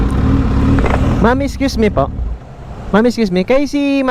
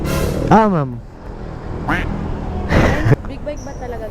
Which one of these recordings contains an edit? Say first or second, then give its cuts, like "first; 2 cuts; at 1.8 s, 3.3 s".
second; 1 cut; at 3.1 s